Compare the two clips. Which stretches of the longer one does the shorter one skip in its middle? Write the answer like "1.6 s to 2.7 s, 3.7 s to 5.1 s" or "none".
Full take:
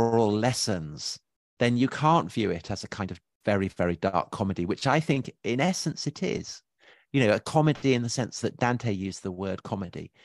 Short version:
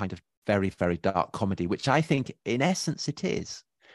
none